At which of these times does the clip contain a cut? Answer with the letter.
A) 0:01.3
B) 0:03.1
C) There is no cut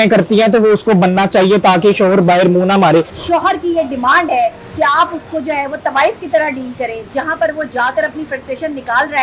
B